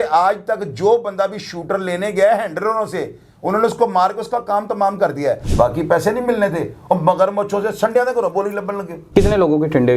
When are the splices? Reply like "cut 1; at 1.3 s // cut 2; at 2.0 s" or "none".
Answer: cut 1; at 5.5 s // cut 2; at 8.9 s

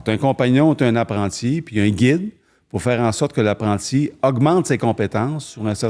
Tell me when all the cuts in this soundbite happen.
none

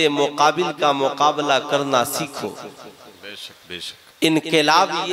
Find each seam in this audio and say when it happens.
cut 1; at 4.0 s

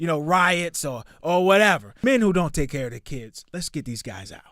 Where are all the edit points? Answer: cut 1; at 1.9 s

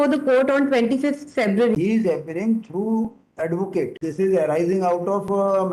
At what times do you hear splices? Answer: cut 1; at 1.4 s // cut 2; at 4.0 s

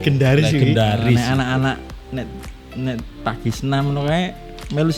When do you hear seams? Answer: cut 1; at 1.1 s

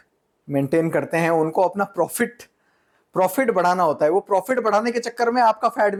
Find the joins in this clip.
none

